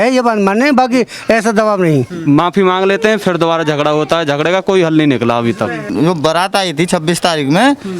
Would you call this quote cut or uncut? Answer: cut